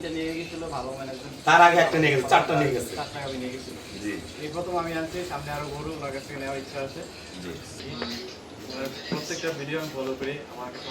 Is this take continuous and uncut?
no; 1 cut; at 7.9 s

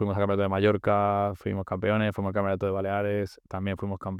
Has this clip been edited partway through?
no; 0 cuts

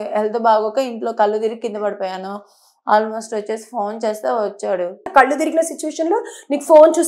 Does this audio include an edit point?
yes; 1 cut; at 5.0 s

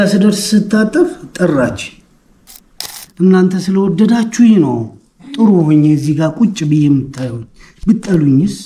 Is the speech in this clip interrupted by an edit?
yes; 1 cut; at 3.0 s

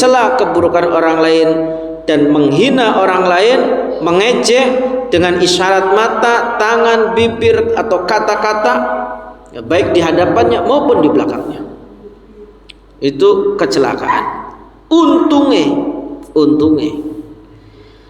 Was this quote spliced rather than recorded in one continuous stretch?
no; 0 cuts

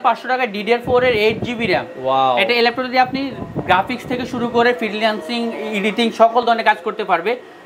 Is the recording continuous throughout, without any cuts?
yes; 0 cuts

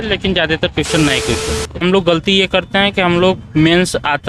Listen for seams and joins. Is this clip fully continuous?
no; 1 cut; at 1.8 s

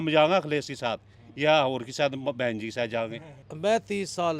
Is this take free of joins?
no; 1 cut; at 3.4 s

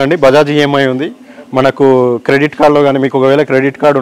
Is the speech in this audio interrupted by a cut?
no; 0 cuts

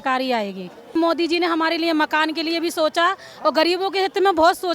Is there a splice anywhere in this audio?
yes; 1 cut; at 0.9 s

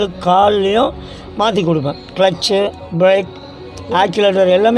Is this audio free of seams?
yes; 0 cuts

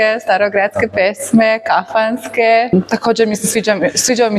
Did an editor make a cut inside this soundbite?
yes; 1 cut; at 2.7 s

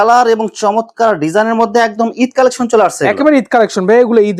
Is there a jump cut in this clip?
no; 0 cuts

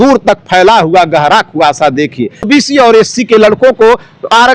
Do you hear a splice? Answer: yes; 1 cut; at 2.5 s

